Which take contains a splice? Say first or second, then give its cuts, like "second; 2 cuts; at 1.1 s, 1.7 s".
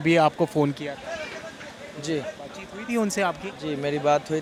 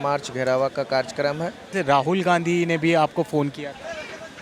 second; 1 cut; at 1.6 s